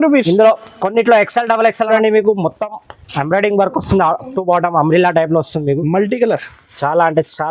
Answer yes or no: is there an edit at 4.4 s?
no